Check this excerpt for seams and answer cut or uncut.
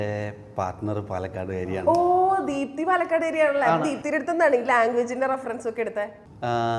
uncut